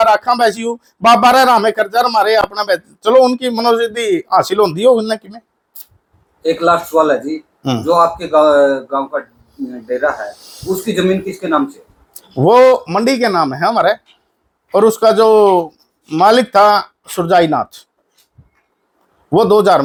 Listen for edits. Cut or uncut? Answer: uncut